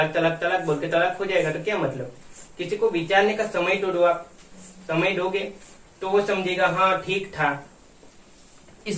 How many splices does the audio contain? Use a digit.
0